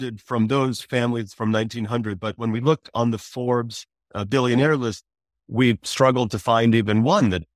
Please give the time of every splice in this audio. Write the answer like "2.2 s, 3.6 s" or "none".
none